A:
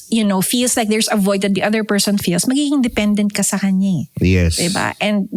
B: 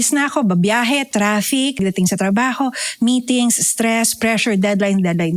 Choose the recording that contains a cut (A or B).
B